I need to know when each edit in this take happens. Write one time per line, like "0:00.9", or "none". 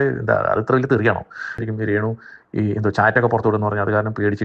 0:01.6